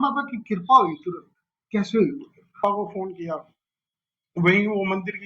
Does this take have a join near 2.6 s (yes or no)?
yes